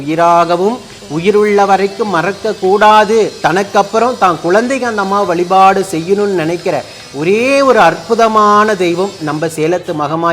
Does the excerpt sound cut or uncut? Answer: uncut